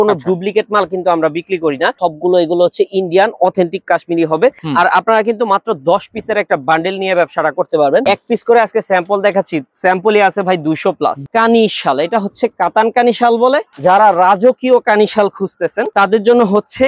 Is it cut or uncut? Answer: cut